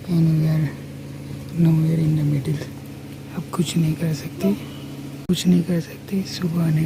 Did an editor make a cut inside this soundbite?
no; 0 cuts

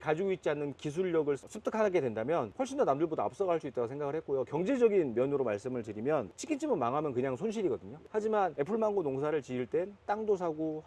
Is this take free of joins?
yes; 0 cuts

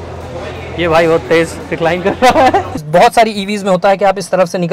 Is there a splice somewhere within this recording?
yes; 1 cut; at 2.7 s

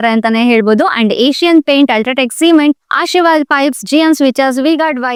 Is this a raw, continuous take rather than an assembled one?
yes; 0 cuts

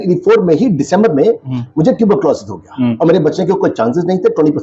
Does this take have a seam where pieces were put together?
no; 0 cuts

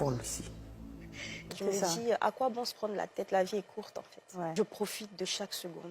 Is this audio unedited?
no; 2 cuts; at 1.5 s, 4.5 s

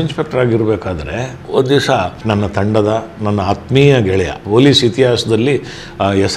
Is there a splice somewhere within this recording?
yes; 3 cuts; at 1.4 s, 2.2 s, 4.4 s

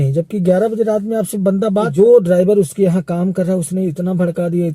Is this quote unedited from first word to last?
no; 1 cut; at 1.9 s

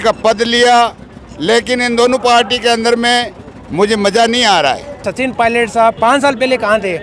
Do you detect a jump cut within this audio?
yes; 2 cuts; at 5.0 s, 6.0 s

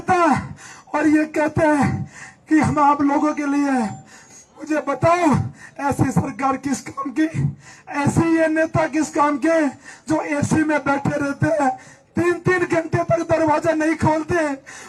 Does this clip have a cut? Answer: no; 0 cuts

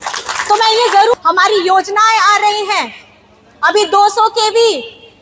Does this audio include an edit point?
yes; 1 cut; at 1.1 s

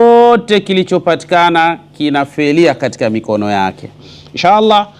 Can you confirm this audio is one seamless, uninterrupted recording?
yes; 0 cuts

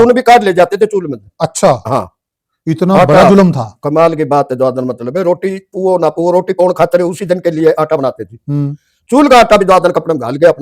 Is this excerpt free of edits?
yes; 0 cuts

